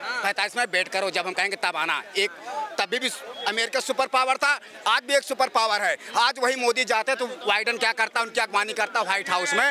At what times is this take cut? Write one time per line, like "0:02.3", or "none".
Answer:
none